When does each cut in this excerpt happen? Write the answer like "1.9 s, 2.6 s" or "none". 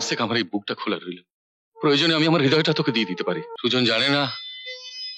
3.5 s